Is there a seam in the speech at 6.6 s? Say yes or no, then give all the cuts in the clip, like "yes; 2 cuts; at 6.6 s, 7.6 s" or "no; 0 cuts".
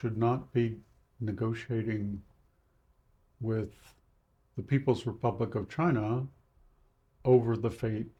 no; 0 cuts